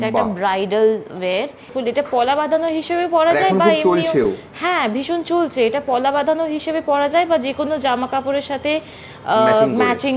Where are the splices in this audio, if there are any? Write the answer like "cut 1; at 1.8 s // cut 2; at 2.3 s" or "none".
cut 1; at 1.7 s